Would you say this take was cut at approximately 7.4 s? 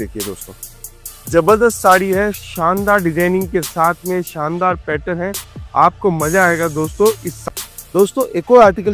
yes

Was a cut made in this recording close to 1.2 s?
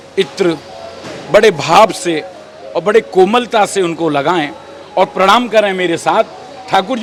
no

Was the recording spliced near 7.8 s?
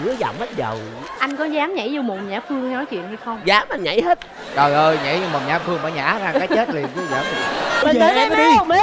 yes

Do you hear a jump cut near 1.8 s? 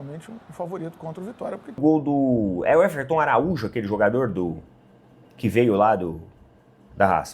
yes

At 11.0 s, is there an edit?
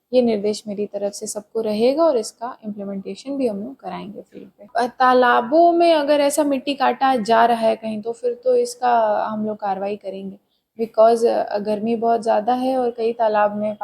no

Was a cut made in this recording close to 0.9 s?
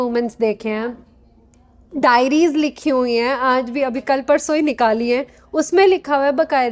no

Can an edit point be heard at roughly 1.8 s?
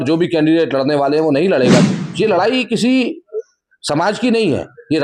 yes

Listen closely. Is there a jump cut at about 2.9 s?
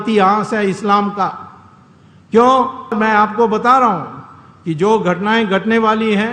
yes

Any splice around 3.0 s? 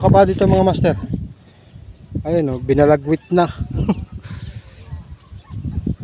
no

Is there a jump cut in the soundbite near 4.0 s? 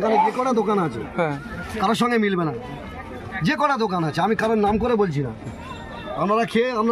no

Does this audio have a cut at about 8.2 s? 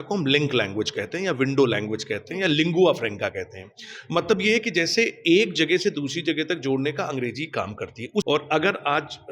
yes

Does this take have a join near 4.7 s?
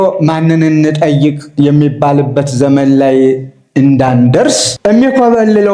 yes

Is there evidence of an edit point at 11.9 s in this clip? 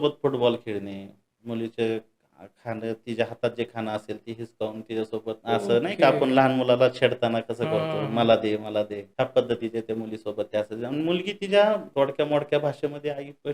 yes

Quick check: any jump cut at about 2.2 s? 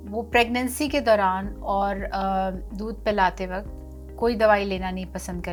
no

